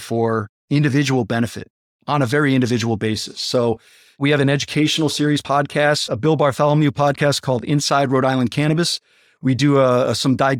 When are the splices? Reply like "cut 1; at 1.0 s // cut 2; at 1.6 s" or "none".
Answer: cut 1; at 4.2 s // cut 2; at 5.5 s

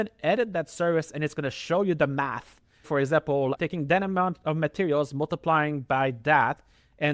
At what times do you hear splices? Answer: cut 1; at 2.9 s

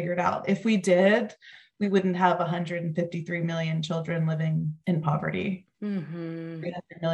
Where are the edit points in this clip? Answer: none

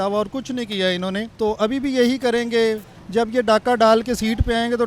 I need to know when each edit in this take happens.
cut 1; at 1.3 s // cut 2; at 2.9 s

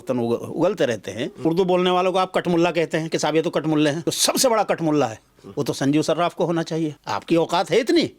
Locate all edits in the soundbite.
cut 1; at 1.4 s // cut 2; at 4.1 s // cut 3; at 7.0 s

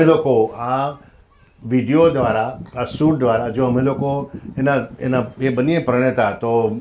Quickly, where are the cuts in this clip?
none

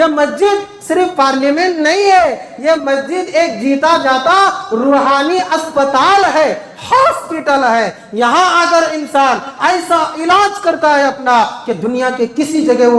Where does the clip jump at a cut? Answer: none

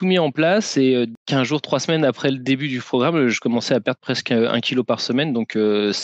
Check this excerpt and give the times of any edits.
cut 1; at 1.2 s

